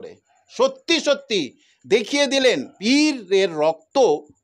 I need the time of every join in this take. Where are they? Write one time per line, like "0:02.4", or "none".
0:02.7